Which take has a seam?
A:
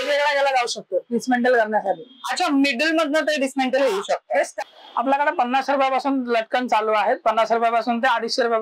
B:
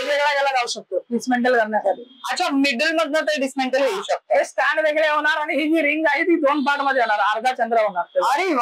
A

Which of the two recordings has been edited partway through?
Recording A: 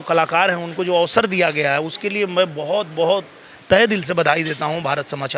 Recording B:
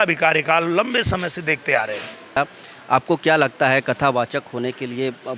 B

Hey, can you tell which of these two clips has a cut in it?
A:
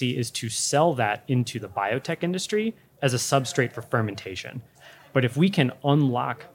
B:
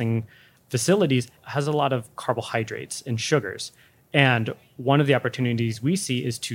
A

